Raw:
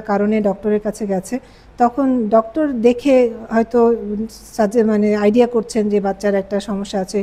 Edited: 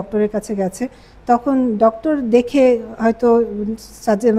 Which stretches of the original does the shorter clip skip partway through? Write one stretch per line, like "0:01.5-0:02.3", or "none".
none